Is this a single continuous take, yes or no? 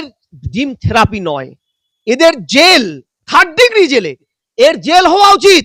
no